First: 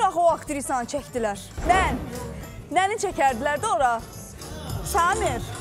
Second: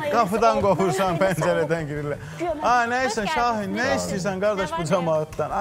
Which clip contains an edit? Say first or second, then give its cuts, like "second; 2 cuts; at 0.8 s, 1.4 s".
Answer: first; 1 cut; at 1.5 s